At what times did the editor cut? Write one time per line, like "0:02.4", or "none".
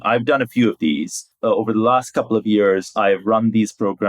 0:01.3